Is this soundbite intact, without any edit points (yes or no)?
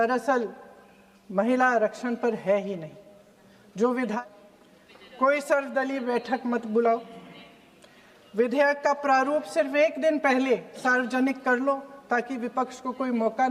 no